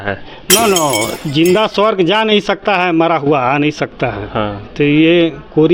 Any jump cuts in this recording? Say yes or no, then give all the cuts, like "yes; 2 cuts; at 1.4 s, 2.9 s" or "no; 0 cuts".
yes; 1 cut; at 1.1 s